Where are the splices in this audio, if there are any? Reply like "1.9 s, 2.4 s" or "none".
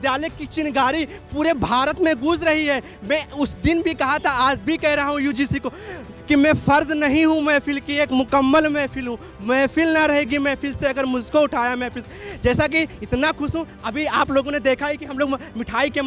none